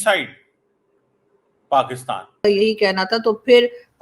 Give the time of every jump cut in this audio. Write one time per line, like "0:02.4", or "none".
0:02.4